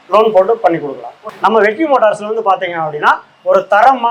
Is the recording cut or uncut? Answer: cut